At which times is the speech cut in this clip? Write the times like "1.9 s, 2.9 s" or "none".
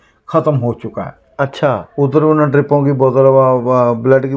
none